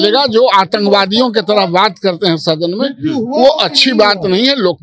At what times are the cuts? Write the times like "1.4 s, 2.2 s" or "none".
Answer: none